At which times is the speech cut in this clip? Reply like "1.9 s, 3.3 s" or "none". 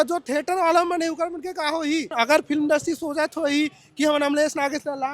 2.1 s